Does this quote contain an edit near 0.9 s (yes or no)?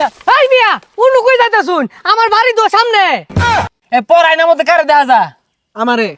no